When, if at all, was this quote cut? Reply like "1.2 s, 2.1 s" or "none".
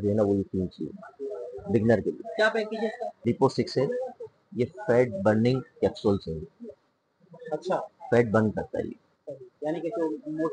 3.1 s